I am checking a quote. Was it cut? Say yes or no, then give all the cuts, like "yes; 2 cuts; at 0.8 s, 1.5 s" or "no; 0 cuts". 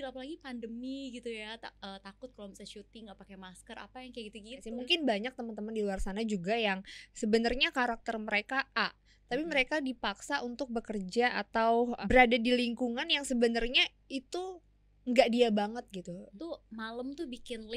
yes; 3 cuts; at 4.7 s, 12.0 s, 16.4 s